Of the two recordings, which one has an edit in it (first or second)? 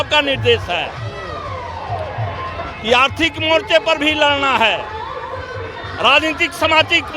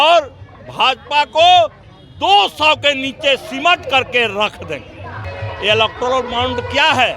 second